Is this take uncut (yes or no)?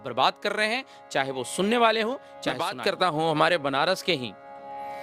no